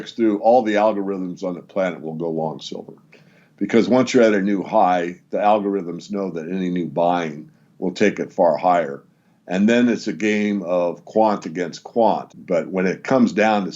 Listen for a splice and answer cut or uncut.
cut